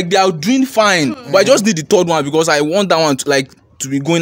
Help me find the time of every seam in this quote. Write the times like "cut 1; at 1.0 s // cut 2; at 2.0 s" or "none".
none